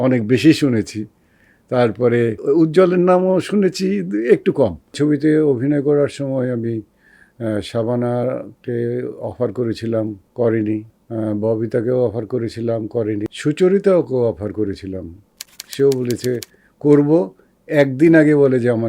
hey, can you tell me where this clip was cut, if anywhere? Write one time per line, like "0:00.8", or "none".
0:02.4
0:05.0
0:10.2
0:11.0
0:13.3